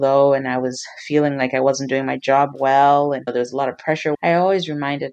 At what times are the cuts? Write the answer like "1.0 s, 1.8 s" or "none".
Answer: 4.2 s